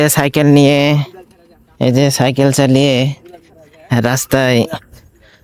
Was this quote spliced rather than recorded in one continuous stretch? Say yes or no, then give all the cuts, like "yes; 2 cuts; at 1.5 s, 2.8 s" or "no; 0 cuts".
no; 0 cuts